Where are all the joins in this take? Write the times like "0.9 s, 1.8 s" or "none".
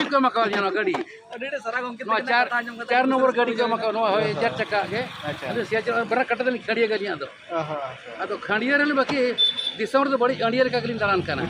none